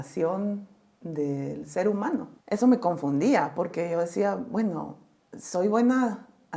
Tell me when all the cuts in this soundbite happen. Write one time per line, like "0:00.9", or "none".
0:02.3